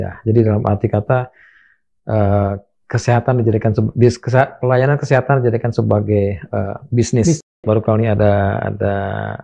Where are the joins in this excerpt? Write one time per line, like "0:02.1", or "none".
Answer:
0:07.6